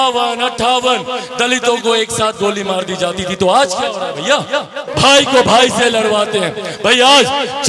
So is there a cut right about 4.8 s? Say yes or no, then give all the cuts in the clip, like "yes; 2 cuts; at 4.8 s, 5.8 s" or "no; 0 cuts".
yes; 1 cut; at 4.8 s